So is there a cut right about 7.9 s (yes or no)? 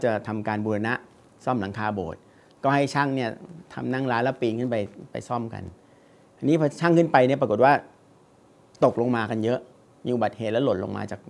no